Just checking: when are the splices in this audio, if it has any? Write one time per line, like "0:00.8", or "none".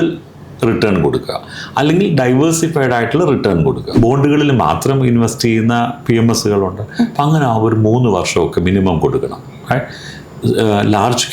0:03.9